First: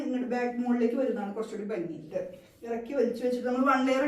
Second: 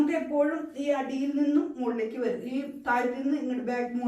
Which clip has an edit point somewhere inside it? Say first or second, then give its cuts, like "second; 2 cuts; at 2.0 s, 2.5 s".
first; 1 cut; at 2.1 s